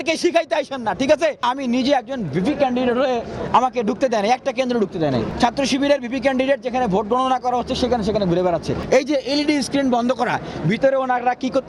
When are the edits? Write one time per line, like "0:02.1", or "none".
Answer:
0:01.4
0:05.3
0:08.8